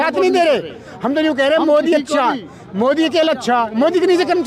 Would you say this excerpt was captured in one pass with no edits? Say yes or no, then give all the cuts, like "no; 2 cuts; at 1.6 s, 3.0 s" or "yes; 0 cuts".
yes; 0 cuts